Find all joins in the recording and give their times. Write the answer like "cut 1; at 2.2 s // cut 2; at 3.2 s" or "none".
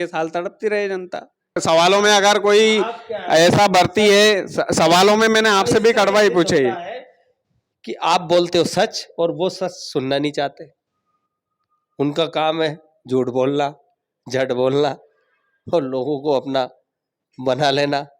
cut 1; at 1.6 s